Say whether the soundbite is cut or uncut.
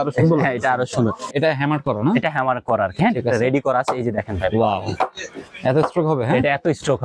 cut